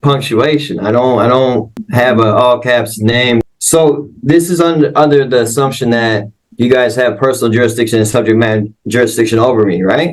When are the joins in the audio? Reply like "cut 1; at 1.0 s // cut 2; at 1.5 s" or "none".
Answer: cut 1; at 1.9 s // cut 2; at 3.4 s

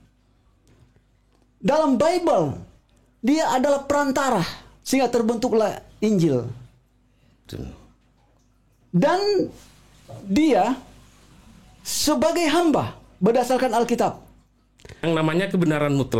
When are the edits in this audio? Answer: cut 1; at 15.0 s

